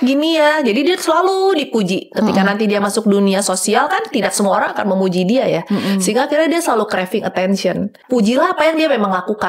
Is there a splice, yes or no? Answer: yes